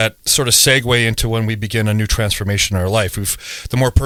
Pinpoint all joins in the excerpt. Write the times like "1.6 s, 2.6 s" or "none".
none